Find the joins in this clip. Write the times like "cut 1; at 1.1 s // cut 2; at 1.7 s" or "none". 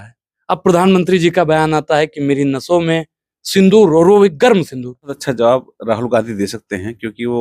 cut 1; at 5.2 s